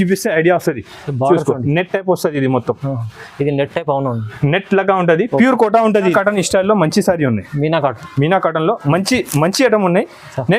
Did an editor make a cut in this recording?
yes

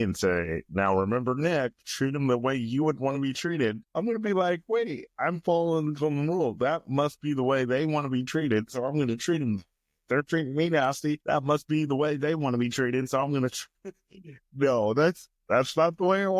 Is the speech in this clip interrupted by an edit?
yes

